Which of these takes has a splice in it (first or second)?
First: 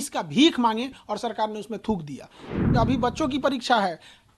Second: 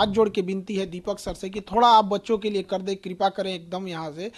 first